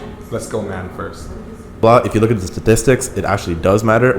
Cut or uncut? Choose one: cut